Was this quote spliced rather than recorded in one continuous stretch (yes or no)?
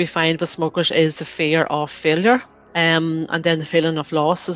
yes